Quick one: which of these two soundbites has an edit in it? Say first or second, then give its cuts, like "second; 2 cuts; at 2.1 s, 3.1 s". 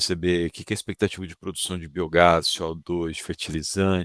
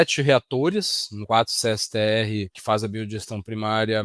second; 2 cuts; at 1.1 s, 2.6 s